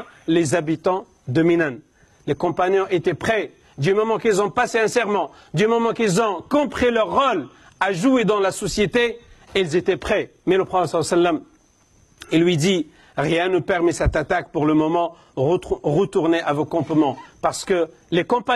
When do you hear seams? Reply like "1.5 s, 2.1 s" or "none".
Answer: 10.3 s